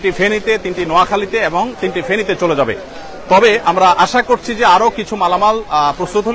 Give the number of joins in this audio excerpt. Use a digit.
0